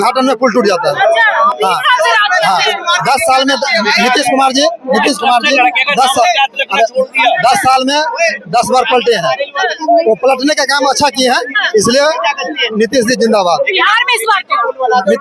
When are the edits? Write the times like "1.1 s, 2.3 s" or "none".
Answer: none